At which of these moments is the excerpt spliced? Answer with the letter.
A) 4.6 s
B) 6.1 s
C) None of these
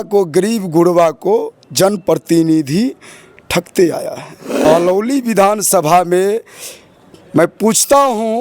A